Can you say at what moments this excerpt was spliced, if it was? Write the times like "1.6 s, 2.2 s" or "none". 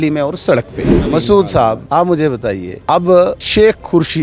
1.0 s, 1.8 s, 2.7 s, 3.4 s